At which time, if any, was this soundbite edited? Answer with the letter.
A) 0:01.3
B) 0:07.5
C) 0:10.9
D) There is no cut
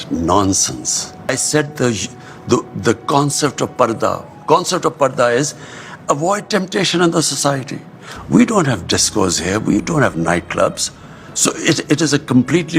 A